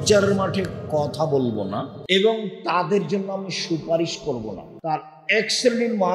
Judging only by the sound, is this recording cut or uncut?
cut